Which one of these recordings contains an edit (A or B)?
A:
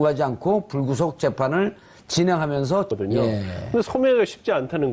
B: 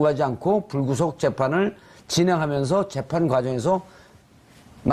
B